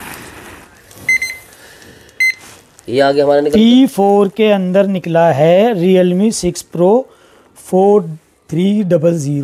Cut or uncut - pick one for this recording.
uncut